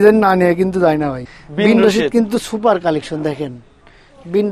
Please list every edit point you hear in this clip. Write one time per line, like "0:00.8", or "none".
0:01.3